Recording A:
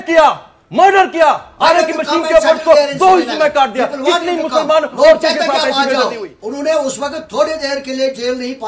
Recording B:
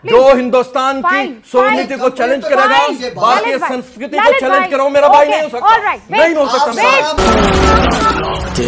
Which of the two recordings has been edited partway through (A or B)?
A